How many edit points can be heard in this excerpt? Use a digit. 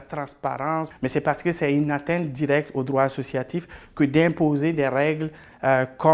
1